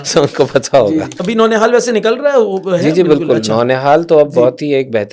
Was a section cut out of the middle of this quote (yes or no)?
yes